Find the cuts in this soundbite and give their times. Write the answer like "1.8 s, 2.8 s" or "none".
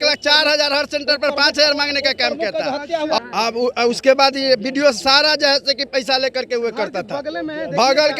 3.2 s